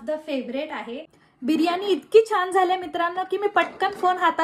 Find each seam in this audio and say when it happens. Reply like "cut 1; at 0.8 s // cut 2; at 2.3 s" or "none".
cut 1; at 1.4 s